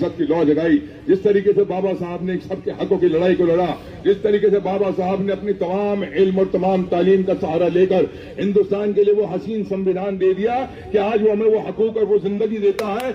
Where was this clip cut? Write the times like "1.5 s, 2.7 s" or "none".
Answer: none